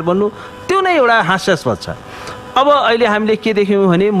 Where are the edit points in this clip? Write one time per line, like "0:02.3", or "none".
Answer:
none